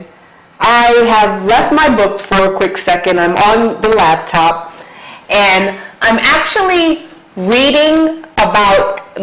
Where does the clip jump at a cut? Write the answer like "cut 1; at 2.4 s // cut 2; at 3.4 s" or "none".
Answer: cut 1; at 5.8 s

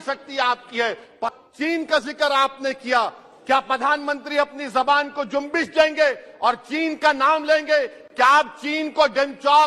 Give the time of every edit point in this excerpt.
cut 1; at 1.4 s

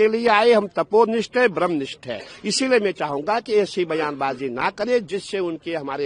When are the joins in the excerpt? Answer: none

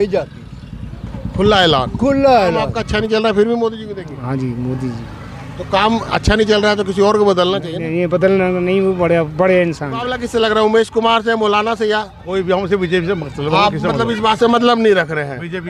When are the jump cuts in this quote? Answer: cut 1; at 2.8 s // cut 2; at 10.2 s

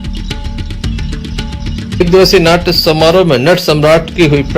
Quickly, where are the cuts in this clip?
cut 1; at 1.0 s

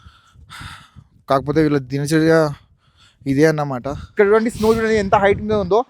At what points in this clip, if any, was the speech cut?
cut 1; at 4.0 s

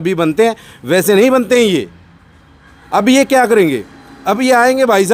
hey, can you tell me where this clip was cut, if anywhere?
none

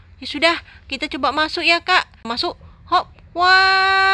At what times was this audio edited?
cut 1; at 2.3 s

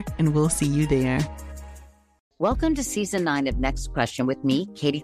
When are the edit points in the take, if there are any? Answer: cut 1; at 2.2 s

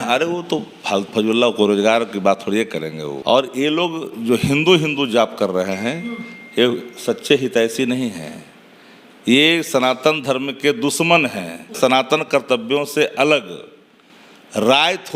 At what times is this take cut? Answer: cut 1; at 3.1 s // cut 2; at 11.8 s

